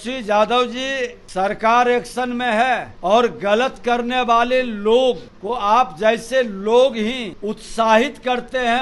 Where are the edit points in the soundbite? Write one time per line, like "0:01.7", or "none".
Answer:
0:01.2
0:02.9
0:05.3
0:07.3